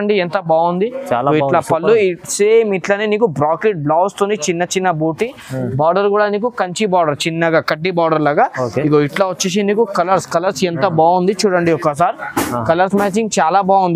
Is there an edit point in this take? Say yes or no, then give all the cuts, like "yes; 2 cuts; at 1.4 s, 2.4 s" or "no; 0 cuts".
no; 0 cuts